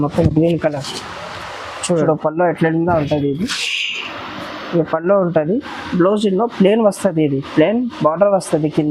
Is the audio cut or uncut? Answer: cut